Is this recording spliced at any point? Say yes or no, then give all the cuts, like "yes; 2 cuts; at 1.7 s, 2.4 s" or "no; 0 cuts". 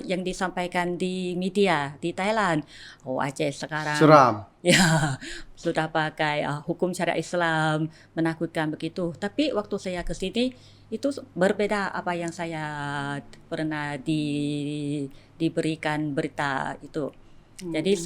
no; 0 cuts